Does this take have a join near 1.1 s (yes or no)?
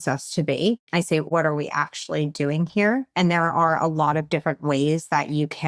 yes